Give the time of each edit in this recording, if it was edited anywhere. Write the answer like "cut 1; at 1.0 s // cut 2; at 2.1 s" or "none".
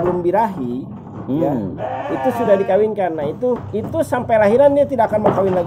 cut 1; at 3.7 s